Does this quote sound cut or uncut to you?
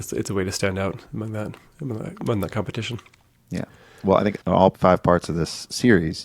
uncut